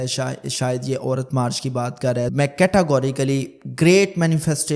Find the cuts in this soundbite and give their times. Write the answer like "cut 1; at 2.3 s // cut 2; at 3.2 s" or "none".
cut 1; at 2.3 s